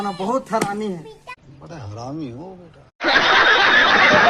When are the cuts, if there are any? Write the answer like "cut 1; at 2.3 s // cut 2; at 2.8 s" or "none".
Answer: none